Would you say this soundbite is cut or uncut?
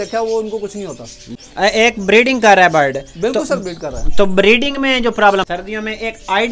cut